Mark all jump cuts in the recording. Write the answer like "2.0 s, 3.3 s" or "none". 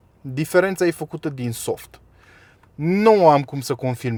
none